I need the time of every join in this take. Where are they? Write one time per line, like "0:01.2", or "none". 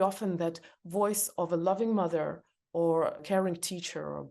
0:03.2